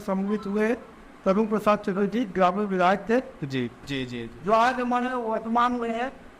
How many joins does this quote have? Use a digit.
1